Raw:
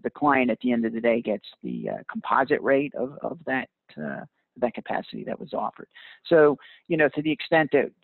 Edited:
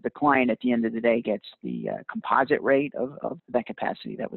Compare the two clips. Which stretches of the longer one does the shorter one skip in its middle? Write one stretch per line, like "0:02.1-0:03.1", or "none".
0:03.4-0:04.5